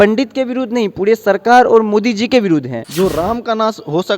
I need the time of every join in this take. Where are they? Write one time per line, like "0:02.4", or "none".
0:02.8